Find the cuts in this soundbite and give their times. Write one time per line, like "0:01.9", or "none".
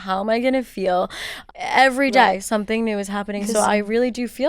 0:01.4